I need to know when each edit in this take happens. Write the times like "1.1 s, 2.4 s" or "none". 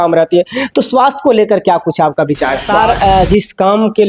2.7 s